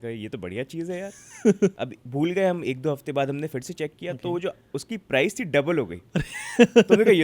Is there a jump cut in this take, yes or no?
yes